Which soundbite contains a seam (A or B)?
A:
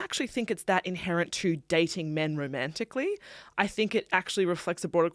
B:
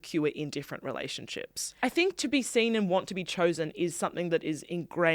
B